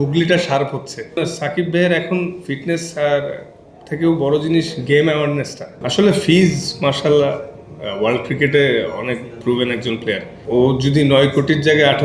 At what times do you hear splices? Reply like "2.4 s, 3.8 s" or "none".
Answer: 1.2 s, 5.8 s, 10.3 s